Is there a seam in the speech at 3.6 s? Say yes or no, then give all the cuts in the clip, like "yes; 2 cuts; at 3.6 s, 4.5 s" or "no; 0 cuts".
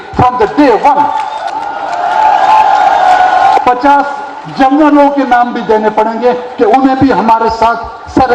yes; 2 cuts; at 1.5 s, 3.6 s